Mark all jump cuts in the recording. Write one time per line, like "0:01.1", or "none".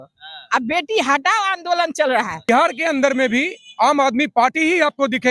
0:02.5